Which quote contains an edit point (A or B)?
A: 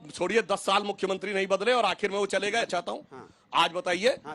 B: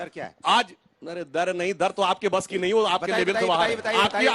A